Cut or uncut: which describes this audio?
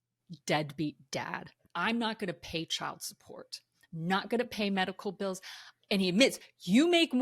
cut